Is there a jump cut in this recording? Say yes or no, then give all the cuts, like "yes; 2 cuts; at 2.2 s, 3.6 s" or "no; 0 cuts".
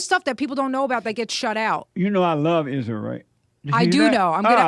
yes; 1 cut; at 1.9 s